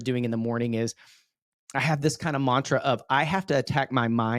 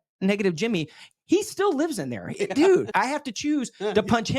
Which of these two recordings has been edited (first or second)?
second